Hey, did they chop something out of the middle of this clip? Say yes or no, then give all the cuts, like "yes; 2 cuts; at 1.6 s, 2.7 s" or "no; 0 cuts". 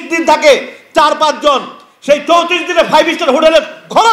no; 0 cuts